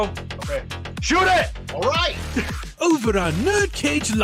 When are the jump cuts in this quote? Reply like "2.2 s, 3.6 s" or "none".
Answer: none

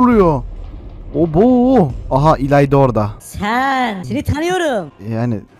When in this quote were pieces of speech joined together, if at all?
3.3 s, 4.0 s

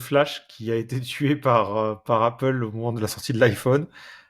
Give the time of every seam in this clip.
none

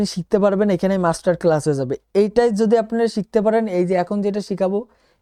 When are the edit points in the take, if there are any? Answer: none

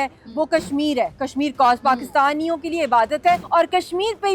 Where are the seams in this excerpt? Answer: 3.4 s

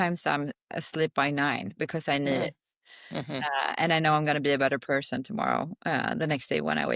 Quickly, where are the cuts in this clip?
none

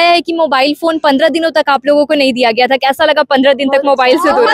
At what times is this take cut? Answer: none

